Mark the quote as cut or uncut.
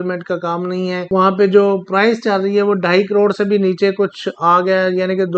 cut